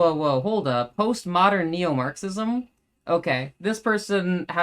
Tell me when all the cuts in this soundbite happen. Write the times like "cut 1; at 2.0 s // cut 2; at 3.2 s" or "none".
cut 1; at 0.9 s